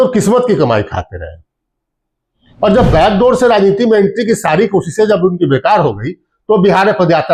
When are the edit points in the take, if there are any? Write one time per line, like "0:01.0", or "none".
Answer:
none